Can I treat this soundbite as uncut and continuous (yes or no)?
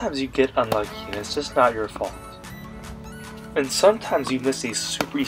yes